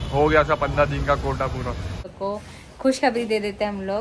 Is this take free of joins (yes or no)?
no